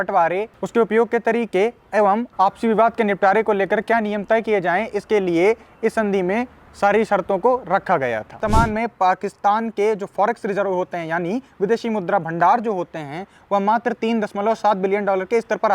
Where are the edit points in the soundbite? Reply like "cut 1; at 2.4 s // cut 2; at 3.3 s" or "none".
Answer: cut 1; at 8.4 s